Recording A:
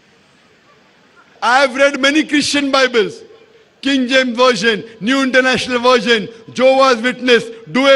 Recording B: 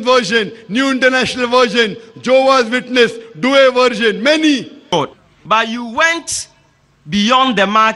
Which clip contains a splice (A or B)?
B